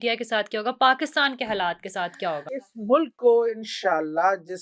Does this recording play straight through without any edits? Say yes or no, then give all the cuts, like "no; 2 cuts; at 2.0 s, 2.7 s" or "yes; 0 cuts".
no; 1 cut; at 2.6 s